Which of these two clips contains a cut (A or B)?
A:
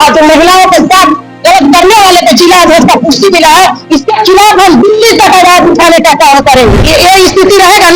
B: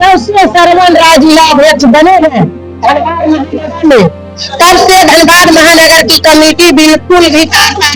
A